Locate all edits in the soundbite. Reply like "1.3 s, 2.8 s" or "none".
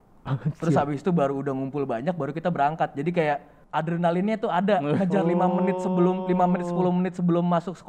3.5 s